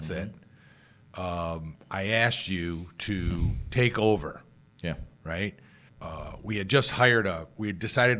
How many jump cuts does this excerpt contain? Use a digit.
1